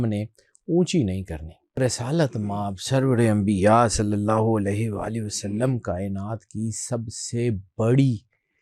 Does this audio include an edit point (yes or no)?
yes